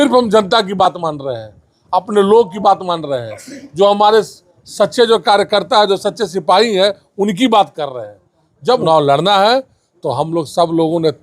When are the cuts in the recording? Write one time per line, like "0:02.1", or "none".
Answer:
0:08.8